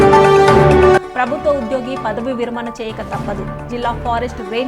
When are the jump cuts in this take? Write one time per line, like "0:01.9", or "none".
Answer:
0:00.9